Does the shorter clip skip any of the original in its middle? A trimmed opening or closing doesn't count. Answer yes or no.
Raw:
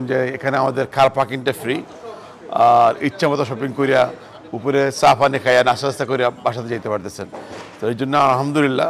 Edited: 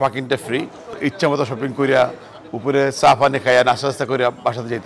yes